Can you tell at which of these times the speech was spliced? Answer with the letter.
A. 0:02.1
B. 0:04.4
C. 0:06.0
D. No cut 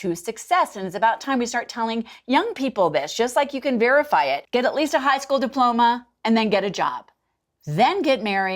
B